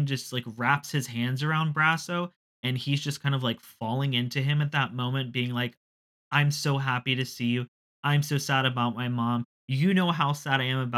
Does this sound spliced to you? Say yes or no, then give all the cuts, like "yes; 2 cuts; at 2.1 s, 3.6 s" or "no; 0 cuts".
no; 0 cuts